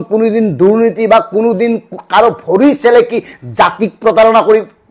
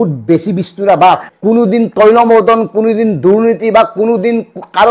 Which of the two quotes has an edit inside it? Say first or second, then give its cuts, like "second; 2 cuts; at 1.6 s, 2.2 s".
second; 1 cut; at 1.3 s